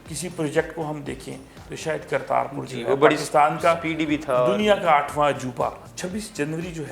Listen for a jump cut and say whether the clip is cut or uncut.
cut